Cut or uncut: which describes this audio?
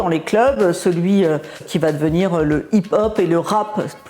cut